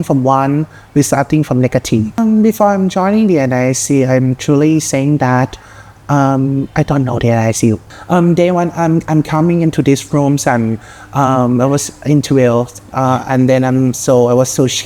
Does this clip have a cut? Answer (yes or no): yes